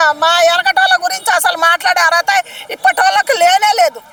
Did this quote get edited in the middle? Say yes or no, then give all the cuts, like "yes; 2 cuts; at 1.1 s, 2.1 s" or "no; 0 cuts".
no; 0 cuts